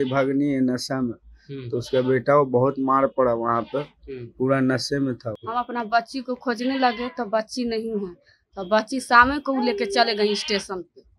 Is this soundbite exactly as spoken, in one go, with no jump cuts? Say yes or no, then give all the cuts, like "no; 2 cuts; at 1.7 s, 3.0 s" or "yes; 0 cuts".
no; 1 cut; at 5.3 s